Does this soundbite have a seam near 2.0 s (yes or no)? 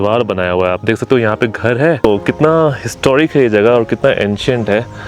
yes